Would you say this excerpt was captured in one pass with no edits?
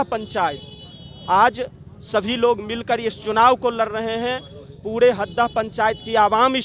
yes; 0 cuts

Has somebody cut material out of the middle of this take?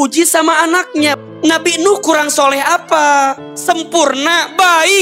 yes; 2 cuts; at 1.1 s, 3.5 s

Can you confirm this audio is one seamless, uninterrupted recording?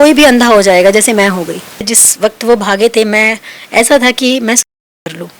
no; 1 cut; at 2.0 s

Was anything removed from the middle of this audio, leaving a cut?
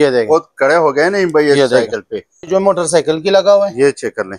yes; 1 cut; at 2.5 s

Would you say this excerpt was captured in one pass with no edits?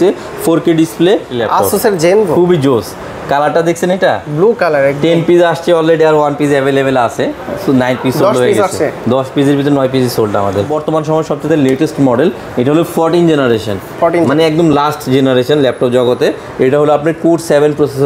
no; 2 cuts; at 1.3 s, 10.7 s

